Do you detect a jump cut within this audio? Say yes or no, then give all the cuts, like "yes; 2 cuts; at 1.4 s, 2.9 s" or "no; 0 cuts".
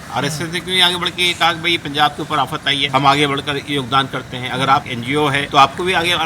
yes; 2 cuts; at 2.8 s, 5.1 s